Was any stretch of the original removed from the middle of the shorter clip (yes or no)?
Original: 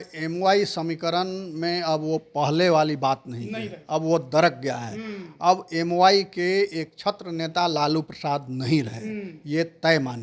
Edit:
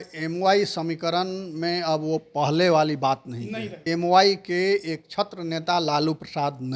yes